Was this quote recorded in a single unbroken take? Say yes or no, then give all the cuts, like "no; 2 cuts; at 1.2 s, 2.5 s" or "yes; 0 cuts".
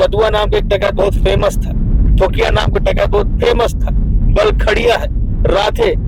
yes; 0 cuts